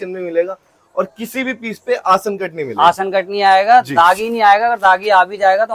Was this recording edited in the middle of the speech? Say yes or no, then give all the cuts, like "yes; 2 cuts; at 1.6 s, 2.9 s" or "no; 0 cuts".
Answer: no; 0 cuts